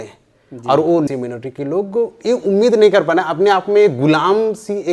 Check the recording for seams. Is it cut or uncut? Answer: cut